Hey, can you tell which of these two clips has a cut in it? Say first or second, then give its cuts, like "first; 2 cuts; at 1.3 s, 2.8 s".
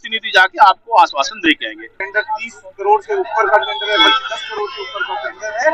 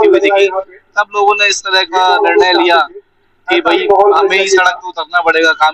first; 1 cut; at 2.0 s